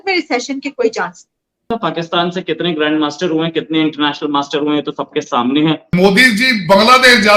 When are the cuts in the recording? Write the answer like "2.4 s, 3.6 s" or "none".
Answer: 1.7 s, 5.9 s